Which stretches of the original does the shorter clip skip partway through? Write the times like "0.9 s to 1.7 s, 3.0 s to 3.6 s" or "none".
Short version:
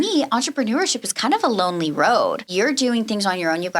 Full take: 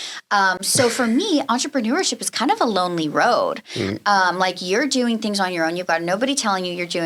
3.6 s to 4.6 s